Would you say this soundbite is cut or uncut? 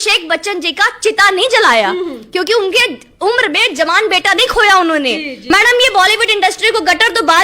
cut